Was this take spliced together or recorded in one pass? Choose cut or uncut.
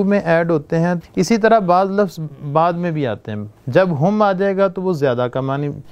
cut